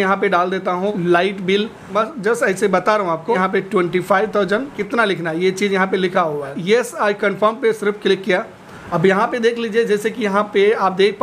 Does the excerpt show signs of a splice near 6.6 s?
yes; 6 cuts; at 1.0 s, 1.9 s, 3.4 s, 4.8 s, 6.6 s, 8.8 s

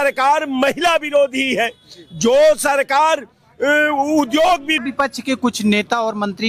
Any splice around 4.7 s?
yes; 1 cut; at 4.7 s

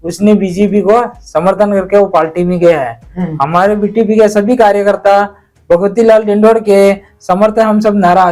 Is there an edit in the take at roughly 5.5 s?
no; 0 cuts

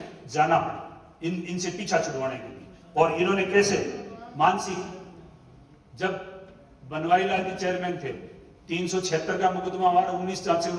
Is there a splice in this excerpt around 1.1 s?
no; 0 cuts

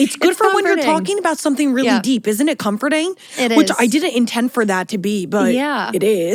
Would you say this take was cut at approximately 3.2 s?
no; 0 cuts

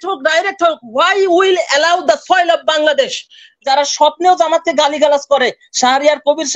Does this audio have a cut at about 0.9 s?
no; 1 cut; at 3.6 s

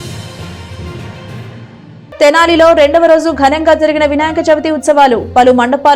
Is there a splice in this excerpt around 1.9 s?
yes; 1 cut; at 1.9 s

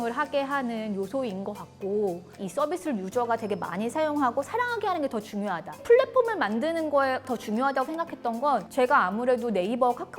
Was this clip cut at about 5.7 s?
yes; 2 cuts; at 2.4 s, 5.7 s

